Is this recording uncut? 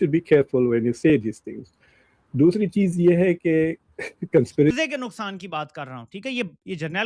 no; 1 cut; at 4.7 s

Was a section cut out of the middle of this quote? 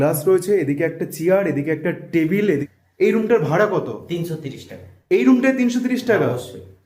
yes; 1 cut; at 2.6 s

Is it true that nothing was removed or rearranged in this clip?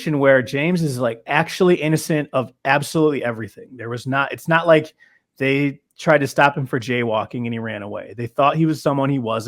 yes; 0 cuts

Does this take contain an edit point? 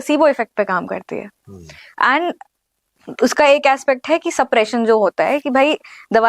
no; 0 cuts

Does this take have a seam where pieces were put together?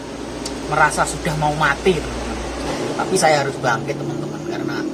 yes; 1 cut; at 2.7 s

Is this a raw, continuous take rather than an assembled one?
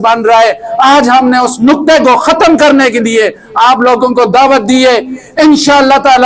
yes; 0 cuts

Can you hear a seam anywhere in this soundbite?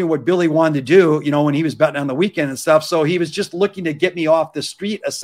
no; 0 cuts

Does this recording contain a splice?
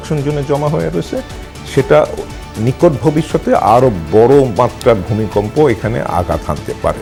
no; 0 cuts

